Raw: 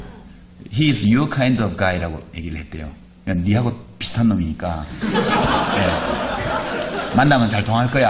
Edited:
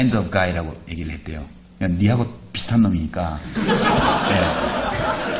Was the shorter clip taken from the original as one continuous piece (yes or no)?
yes